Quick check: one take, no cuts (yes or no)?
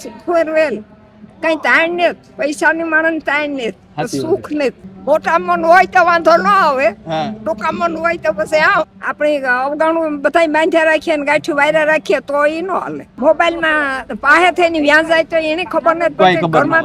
no